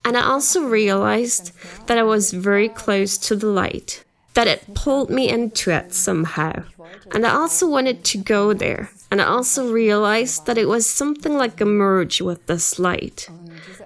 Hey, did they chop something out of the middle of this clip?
no; 0 cuts

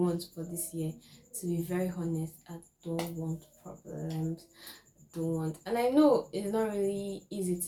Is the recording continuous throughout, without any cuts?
yes; 0 cuts

